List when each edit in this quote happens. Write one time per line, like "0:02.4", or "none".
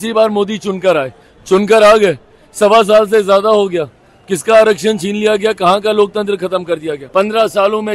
0:07.0